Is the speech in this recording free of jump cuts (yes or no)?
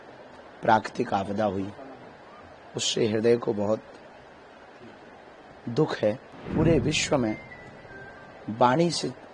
no